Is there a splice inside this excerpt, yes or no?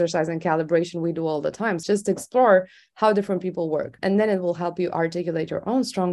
yes